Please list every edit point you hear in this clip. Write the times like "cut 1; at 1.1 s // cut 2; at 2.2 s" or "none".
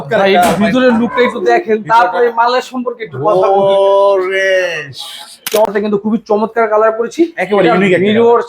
cut 1; at 5.7 s